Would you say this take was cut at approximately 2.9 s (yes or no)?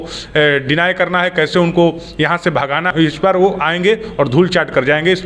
yes